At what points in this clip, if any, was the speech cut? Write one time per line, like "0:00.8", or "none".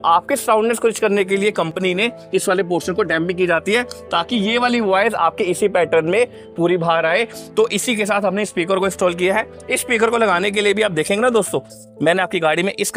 none